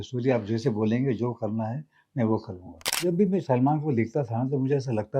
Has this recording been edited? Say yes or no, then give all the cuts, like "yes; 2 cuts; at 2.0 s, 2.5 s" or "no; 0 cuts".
yes; 1 cut; at 3.0 s